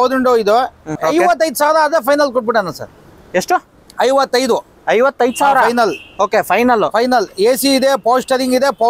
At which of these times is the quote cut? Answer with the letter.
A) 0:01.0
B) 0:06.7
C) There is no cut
A